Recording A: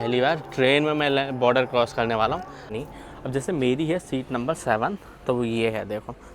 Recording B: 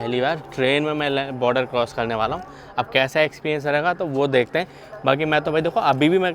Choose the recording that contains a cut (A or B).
A